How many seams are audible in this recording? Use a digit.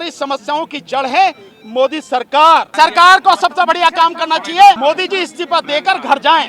2